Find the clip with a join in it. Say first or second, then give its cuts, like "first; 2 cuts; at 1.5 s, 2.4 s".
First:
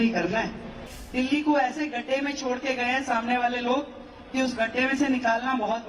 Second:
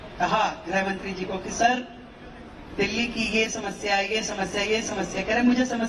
first; 1 cut; at 0.9 s